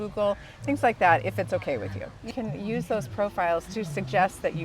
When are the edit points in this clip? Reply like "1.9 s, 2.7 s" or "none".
2.3 s, 3.7 s